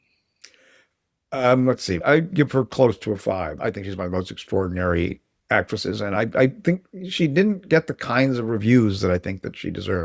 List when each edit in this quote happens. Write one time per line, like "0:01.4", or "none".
none